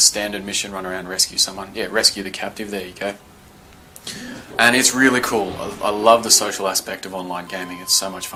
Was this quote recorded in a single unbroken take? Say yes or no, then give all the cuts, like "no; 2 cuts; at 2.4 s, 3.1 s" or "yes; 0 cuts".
yes; 0 cuts